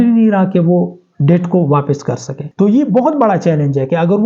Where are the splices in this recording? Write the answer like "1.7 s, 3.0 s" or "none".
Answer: 2.4 s